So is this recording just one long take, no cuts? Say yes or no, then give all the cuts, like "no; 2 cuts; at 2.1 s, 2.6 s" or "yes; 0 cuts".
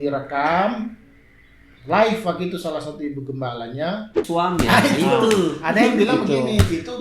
no; 1 cut; at 4.3 s